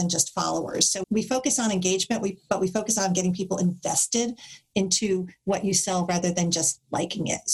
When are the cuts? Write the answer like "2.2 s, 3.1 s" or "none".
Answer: 1.0 s